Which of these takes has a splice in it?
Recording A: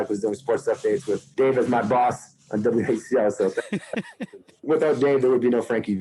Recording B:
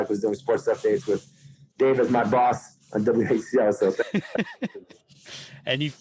A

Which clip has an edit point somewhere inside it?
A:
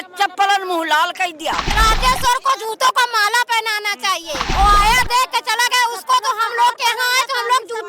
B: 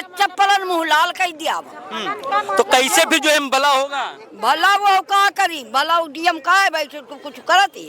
A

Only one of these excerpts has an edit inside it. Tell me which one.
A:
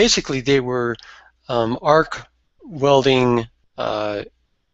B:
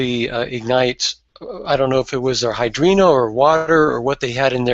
B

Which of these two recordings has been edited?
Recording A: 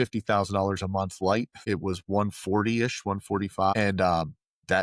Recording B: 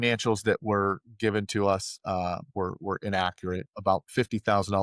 A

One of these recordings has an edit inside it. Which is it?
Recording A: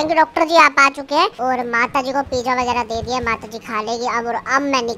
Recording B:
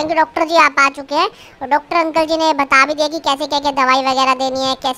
A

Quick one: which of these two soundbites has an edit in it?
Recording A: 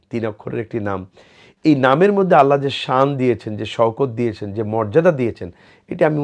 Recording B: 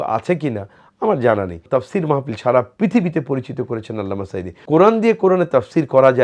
B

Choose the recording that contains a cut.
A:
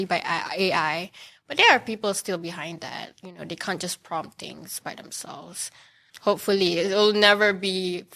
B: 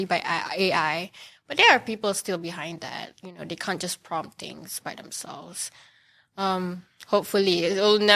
A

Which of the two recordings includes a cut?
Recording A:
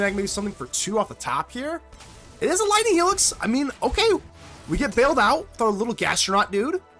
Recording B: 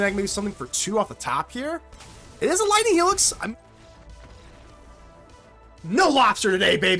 B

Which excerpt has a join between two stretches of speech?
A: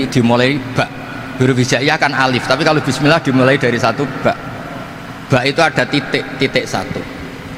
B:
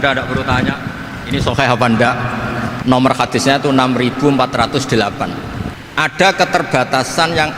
B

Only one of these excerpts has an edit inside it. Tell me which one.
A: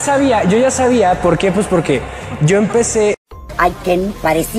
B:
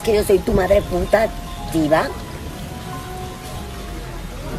A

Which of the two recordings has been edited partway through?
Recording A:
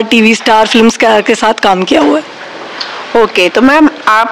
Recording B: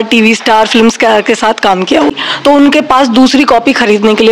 B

